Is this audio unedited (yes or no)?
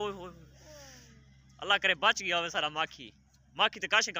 yes